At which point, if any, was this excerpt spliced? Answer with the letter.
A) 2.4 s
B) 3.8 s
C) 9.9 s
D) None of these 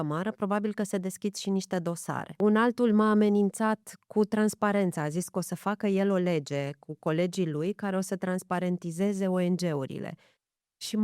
A